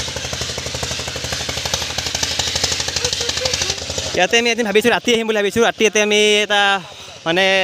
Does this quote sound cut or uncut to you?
cut